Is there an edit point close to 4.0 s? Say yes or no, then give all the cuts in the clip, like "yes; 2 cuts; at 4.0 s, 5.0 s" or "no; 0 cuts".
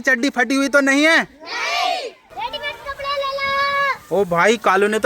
no; 1 cut; at 2.1 s